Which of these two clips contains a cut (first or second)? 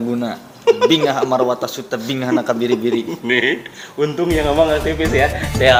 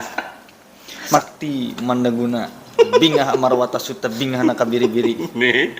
second